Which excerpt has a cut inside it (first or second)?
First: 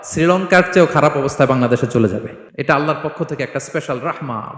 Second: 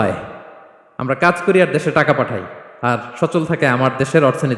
first